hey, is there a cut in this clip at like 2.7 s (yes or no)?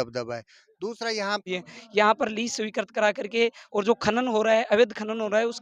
no